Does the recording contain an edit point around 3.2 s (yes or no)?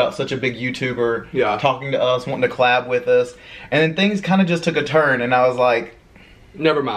no